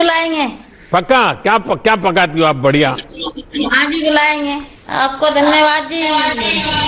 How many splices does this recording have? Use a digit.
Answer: 1